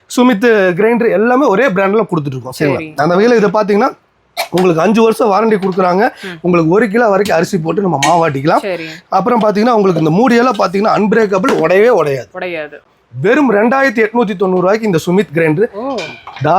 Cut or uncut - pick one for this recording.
cut